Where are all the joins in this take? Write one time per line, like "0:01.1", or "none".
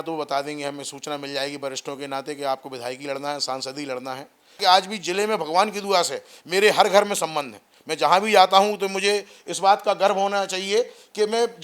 0:04.6